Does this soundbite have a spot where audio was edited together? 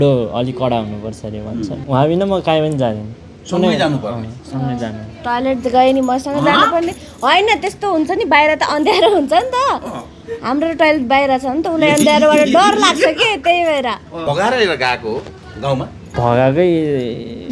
yes; 3 cuts; at 1.8 s, 14.2 s, 16.0 s

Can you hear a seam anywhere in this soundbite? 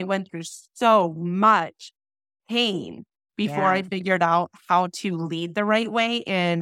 no; 0 cuts

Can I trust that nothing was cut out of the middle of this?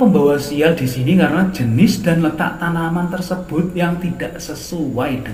yes; 0 cuts

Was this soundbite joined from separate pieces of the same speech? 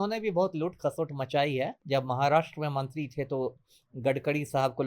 yes; 1 cut; at 1.8 s

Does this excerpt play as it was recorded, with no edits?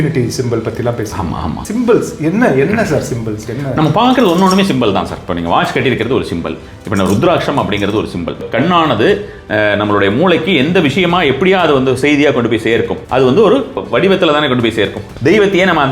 no; 5 cuts; at 1.6 s, 8.4 s, 13.0 s, 13.8 s, 15.0 s

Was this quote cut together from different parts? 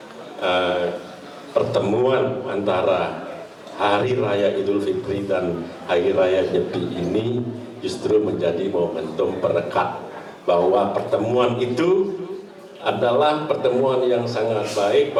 no; 0 cuts

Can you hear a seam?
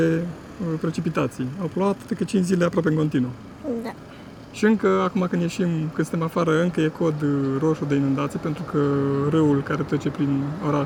no; 0 cuts

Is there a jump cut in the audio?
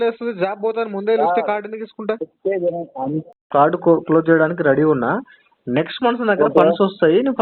yes; 1 cut; at 3.3 s

